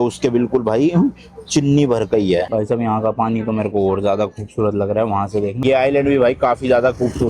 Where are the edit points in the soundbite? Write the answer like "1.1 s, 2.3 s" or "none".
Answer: 2.5 s, 5.6 s